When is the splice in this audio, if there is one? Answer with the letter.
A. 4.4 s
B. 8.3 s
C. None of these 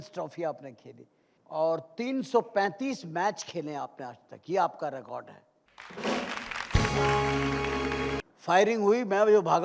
B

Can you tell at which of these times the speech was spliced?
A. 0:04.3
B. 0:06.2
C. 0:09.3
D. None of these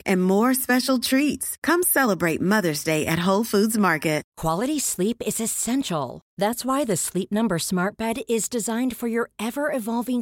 A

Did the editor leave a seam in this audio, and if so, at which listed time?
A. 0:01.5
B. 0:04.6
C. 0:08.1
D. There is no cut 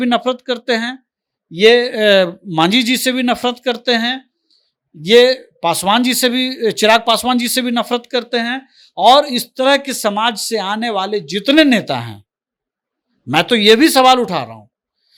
D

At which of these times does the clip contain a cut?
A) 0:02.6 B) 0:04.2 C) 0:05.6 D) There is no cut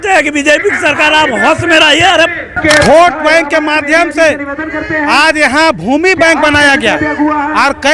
A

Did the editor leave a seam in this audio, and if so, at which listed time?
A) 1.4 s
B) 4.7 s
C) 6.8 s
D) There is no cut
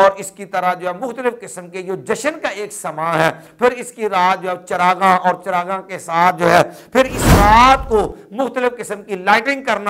D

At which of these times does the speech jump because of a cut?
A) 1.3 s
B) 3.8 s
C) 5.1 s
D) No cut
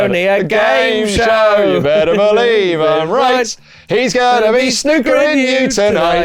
D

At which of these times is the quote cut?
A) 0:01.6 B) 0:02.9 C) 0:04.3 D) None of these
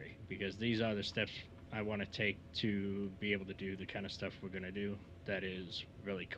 D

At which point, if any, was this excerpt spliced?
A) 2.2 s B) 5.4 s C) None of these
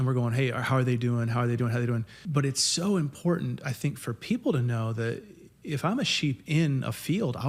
A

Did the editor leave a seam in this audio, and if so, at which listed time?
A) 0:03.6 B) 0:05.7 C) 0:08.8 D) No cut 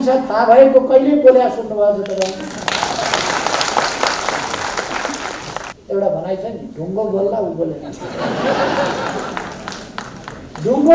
B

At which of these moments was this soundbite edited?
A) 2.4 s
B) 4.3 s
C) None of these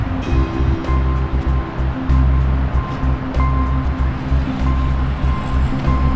C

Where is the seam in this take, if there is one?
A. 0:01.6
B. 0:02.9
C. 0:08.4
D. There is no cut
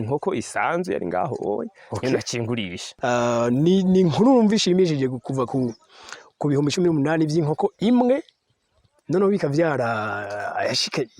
B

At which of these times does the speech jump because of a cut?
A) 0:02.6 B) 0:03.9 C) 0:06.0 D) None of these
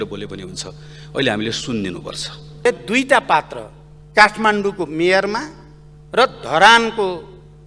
A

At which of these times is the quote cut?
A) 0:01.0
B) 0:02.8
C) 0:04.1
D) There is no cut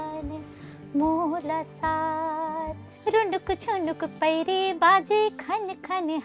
B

